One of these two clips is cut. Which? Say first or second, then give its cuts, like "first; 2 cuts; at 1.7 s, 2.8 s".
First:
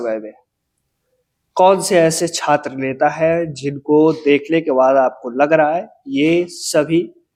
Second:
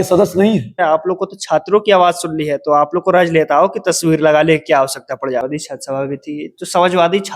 second; 2 cuts; at 0.8 s, 5.4 s